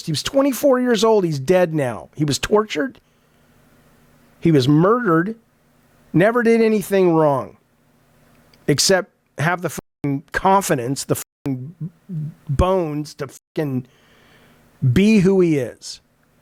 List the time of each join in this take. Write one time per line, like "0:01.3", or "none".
none